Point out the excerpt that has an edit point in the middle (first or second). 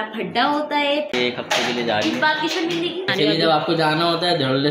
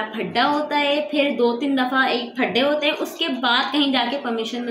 first